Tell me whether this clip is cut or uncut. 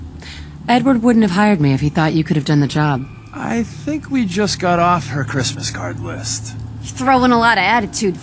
uncut